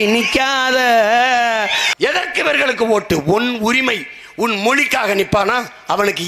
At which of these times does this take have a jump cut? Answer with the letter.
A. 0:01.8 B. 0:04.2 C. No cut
A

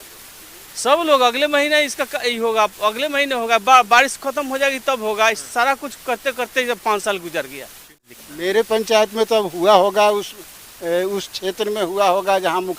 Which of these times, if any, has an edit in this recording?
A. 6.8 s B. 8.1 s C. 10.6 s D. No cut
B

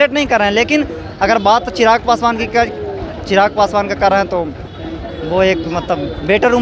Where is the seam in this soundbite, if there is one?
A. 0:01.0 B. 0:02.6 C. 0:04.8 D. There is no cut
D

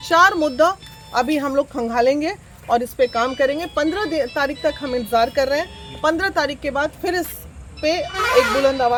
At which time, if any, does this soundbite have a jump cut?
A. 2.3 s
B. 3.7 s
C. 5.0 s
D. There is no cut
D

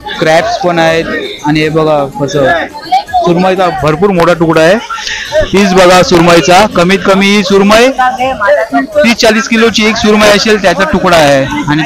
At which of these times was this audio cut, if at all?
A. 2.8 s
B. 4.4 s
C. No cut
C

